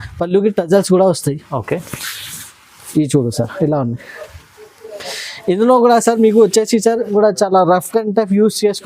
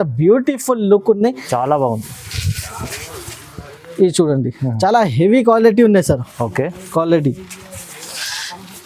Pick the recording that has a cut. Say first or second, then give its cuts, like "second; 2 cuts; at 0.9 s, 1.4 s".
first; 1 cut; at 7.1 s